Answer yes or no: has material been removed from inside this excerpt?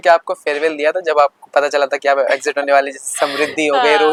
no